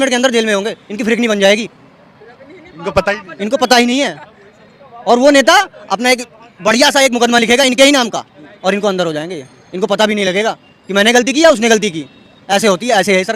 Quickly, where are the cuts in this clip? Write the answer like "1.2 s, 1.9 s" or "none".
none